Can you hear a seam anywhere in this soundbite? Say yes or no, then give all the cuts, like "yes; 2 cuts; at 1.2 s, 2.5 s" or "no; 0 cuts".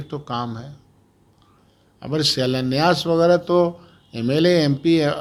no; 0 cuts